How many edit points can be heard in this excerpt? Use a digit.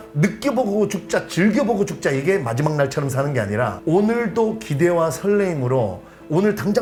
0